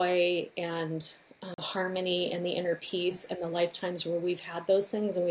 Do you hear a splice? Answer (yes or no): yes